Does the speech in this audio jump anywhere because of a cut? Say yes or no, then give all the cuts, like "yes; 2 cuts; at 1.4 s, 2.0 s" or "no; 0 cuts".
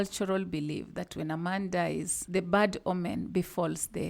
yes; 1 cut; at 2.2 s